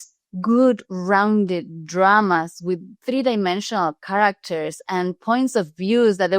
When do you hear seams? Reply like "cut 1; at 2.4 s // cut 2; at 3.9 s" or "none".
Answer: cut 1; at 2.9 s

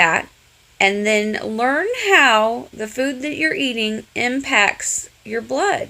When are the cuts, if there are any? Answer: none

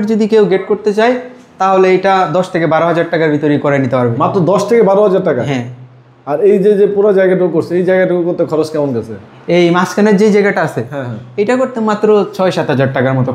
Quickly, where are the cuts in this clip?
none

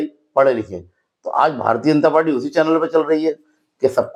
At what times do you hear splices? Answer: none

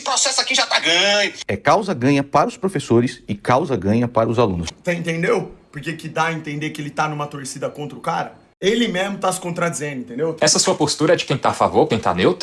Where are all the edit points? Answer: cut 1; at 4.7 s // cut 2; at 8.4 s // cut 3; at 10.4 s

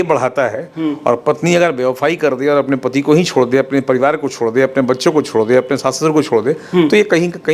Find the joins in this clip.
none

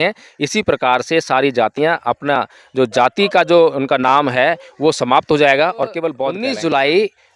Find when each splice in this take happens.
cut 1; at 6.3 s

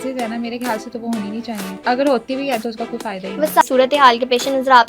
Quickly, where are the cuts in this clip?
cut 1; at 1.8 s // cut 2; at 3.6 s

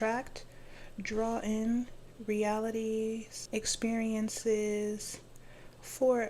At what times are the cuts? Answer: cut 1; at 3.3 s

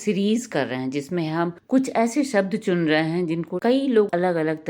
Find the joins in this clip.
cut 1; at 1.6 s

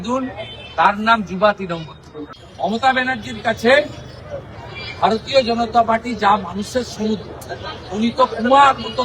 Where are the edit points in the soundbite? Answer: cut 1; at 2.4 s

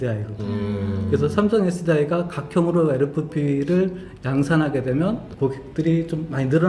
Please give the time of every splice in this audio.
cut 1; at 5.6 s

